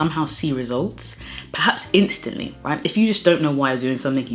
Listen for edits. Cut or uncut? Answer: uncut